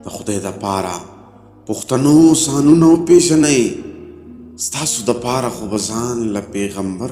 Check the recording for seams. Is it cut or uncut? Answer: uncut